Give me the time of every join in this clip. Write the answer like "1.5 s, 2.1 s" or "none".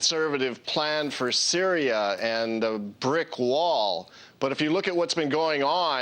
4.4 s